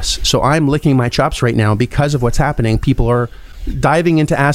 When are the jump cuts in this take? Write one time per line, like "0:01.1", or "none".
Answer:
none